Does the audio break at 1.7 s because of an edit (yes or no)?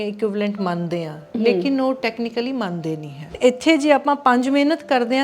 no